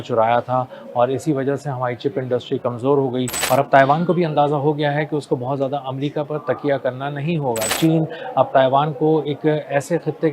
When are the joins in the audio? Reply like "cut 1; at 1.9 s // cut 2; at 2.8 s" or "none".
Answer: cut 1; at 3.4 s // cut 2; at 7.7 s